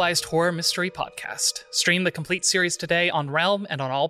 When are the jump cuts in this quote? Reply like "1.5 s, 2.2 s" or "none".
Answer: none